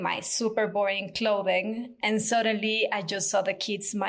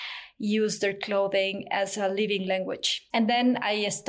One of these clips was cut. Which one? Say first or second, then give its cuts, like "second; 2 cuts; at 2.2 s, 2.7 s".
second; 1 cut; at 3.0 s